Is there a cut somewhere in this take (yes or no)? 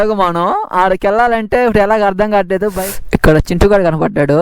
yes